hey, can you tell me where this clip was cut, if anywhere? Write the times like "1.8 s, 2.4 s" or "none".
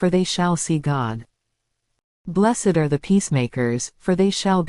2.2 s